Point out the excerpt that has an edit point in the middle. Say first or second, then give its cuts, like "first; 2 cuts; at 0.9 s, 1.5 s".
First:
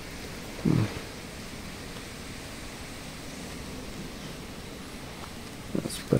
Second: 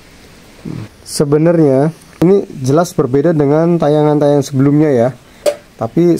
second; 3 cuts; at 1.0 s, 2.2 s, 5.3 s